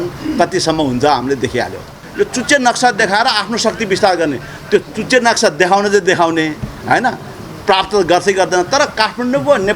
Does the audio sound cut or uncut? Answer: cut